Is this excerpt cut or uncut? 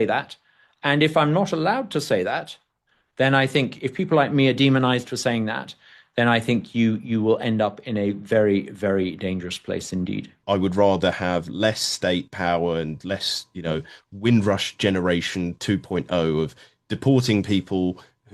cut